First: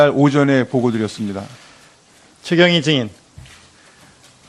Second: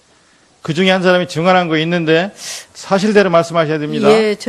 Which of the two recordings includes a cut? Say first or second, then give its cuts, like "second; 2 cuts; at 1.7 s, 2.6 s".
first; 1 cut; at 0.9 s